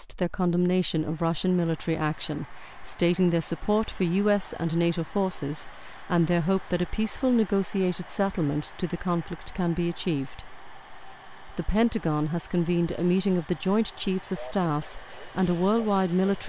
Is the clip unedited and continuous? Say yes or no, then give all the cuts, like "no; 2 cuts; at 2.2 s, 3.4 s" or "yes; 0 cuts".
no; 1 cut; at 3.6 s